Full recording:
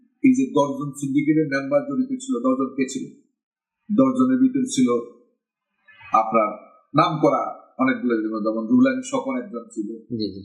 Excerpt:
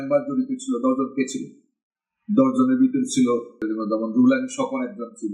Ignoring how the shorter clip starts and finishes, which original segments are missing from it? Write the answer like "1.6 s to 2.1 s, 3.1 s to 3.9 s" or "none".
5.3 s to 8.2 s